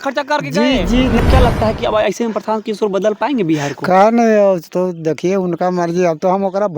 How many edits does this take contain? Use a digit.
1